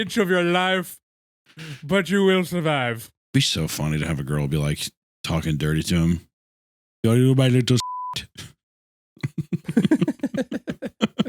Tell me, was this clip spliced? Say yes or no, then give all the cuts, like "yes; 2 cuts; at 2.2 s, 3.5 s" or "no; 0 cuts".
yes; 1 cut; at 3.1 s